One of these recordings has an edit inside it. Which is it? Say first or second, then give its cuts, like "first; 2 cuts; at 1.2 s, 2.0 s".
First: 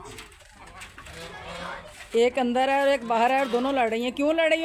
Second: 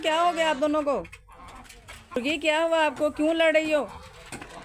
second; 1 cut; at 2.2 s